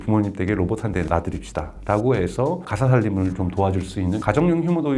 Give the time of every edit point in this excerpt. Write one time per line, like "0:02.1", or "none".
0:01.1
0:02.7
0:04.2